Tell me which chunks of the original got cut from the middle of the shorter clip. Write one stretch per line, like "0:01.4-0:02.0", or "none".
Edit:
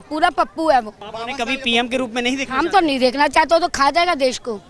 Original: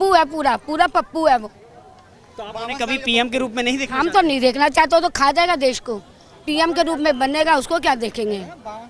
0:01.6-0:02.4